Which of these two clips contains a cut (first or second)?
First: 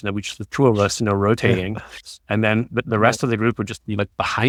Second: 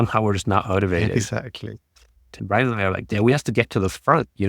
second